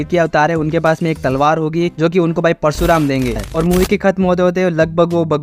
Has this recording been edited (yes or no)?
yes